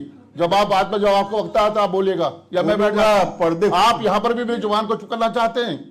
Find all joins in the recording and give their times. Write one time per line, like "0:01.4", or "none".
none